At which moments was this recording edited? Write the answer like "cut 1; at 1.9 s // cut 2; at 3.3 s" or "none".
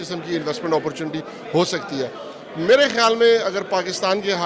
none